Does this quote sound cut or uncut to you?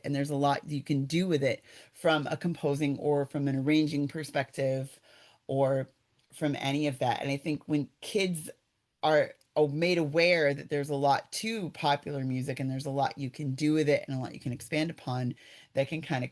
uncut